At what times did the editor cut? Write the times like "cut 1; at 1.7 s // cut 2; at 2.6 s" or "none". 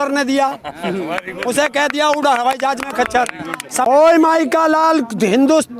cut 1; at 3.9 s